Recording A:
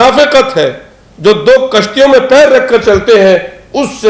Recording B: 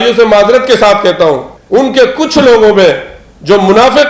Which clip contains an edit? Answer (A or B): B